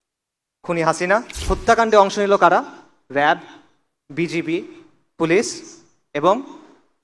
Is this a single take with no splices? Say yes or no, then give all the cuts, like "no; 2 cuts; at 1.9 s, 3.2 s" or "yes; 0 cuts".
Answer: no; 1 cut; at 1.4 s